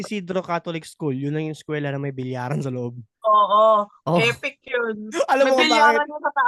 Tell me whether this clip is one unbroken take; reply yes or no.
yes